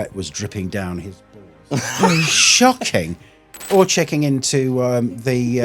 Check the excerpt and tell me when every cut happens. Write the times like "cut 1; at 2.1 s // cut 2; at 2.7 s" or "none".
cut 1; at 3.7 s